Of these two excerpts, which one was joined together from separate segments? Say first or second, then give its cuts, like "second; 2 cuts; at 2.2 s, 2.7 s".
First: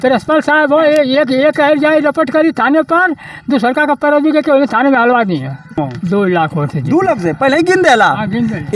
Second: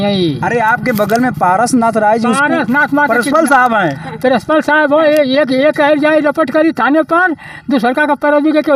first; 1 cut; at 5.8 s